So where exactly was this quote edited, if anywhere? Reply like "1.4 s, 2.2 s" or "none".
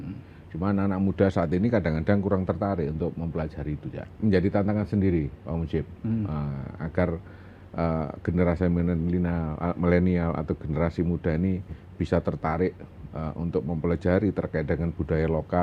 4.1 s